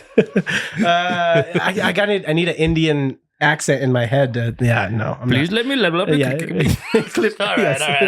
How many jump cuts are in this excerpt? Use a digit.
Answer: 0